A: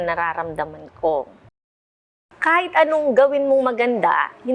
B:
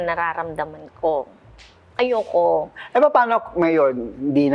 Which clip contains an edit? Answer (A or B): A